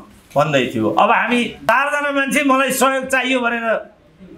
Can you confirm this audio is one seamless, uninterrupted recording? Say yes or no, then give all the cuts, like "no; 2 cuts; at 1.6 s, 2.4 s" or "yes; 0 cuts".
no; 1 cut; at 1.7 s